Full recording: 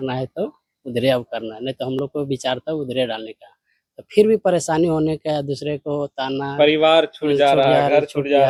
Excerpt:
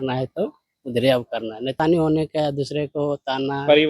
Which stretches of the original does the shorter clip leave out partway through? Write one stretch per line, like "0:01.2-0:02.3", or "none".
0:01.8-0:04.7